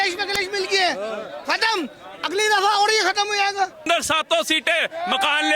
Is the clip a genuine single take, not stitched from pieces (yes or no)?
no